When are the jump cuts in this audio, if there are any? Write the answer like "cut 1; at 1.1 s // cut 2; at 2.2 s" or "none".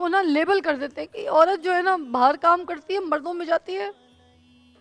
none

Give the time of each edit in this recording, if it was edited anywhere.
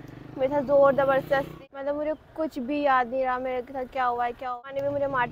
cut 1; at 1.6 s // cut 2; at 4.6 s

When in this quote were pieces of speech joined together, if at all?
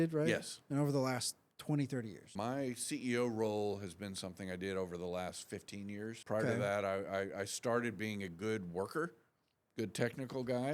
cut 1; at 2.2 s // cut 2; at 6.2 s

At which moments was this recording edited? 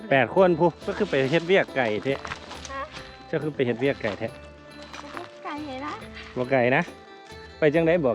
cut 1; at 1.3 s

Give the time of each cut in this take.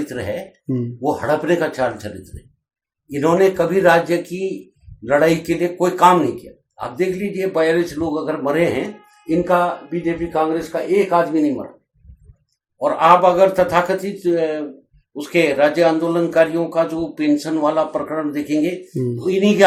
none

